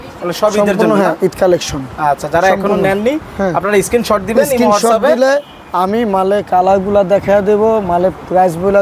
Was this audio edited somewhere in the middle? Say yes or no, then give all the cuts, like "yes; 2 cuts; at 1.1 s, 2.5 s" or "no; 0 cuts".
no; 0 cuts